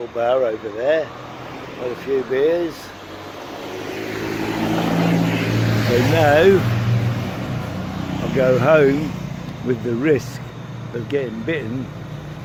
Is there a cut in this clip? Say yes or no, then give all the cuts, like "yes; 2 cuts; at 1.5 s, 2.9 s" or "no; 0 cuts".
no; 0 cuts